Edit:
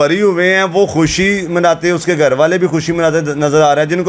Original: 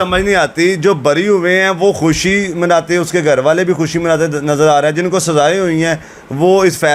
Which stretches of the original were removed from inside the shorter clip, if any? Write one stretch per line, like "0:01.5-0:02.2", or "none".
none